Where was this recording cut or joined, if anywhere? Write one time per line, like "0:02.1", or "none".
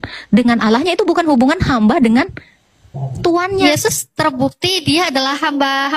0:03.6